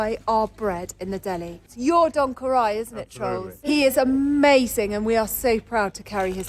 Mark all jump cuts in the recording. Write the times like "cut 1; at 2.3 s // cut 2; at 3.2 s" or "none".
cut 1; at 1.7 s // cut 2; at 3.5 s